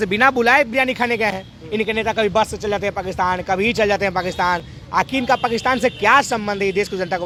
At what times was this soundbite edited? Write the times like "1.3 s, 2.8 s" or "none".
none